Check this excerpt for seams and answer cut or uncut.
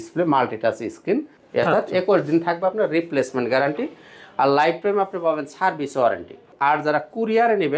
cut